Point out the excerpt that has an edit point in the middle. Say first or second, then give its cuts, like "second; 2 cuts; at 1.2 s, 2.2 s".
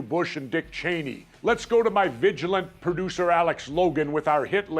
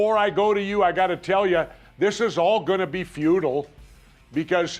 first; 1 cut; at 3.4 s